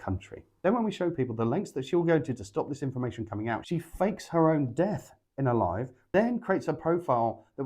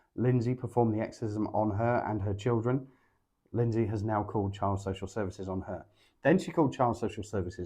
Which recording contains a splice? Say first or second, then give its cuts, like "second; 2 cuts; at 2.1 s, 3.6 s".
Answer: first; 2 cuts; at 3.6 s, 5.9 s